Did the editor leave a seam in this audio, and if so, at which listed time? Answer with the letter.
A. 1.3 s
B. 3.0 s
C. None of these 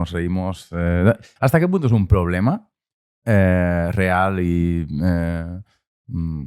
A